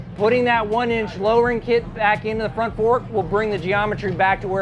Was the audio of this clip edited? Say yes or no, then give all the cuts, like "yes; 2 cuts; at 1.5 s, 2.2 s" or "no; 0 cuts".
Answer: no; 0 cuts